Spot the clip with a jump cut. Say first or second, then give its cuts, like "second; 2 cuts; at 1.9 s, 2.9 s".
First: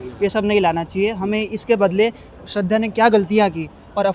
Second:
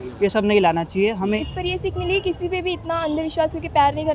second; 1 cut; at 1.4 s